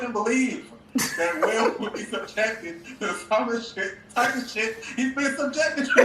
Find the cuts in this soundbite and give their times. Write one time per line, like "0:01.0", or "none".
none

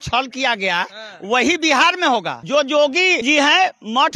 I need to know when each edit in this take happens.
0:02.4
0:03.2

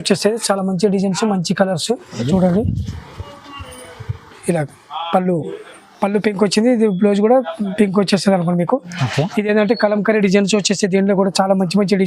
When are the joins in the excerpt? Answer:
0:02.2

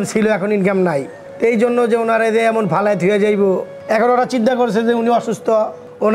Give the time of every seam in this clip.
0:03.7

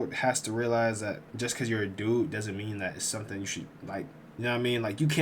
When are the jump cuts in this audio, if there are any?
0:04.2

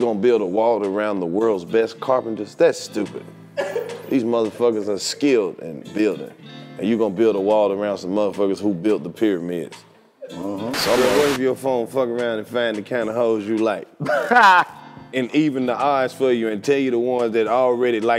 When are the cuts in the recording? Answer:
0:11.0

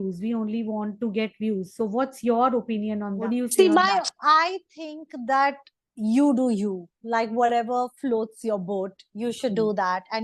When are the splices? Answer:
0:03.2

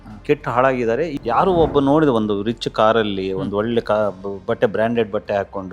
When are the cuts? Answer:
0:01.1

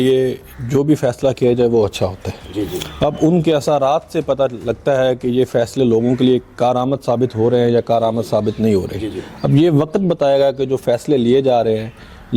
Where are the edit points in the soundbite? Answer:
none

